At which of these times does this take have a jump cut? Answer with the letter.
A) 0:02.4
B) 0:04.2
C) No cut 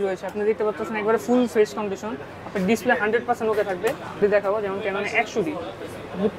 B